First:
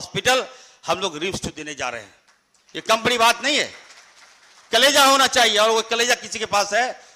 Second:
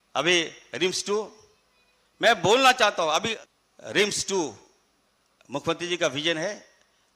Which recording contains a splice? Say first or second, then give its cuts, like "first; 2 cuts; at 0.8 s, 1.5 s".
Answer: second; 1 cut; at 3.4 s